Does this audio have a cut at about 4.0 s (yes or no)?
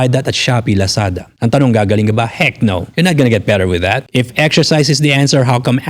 yes